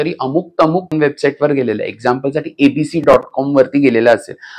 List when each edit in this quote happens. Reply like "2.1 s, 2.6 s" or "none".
0.9 s